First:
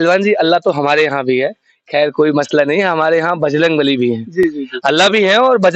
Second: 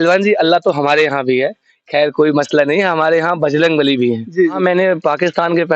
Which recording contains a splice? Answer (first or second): second